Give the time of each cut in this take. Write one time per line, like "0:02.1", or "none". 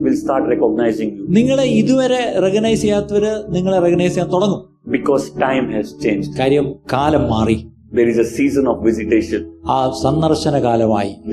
none